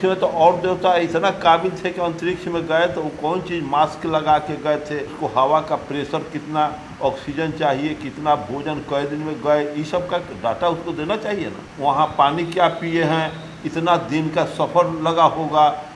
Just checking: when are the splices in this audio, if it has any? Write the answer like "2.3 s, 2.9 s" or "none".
5.1 s, 11.6 s